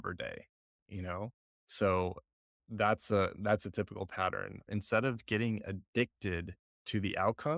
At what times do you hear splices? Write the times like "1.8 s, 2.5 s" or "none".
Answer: 4.5 s